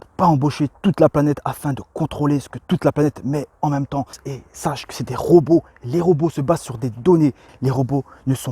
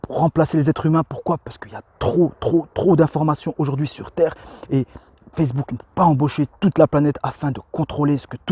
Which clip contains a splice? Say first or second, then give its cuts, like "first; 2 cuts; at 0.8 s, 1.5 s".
first; 2 cuts; at 4.3 s, 7.5 s